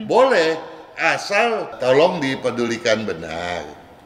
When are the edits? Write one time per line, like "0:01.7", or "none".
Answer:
0:01.7